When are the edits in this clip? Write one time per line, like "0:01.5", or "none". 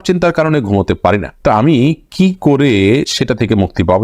none